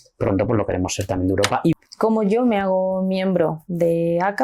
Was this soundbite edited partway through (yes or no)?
yes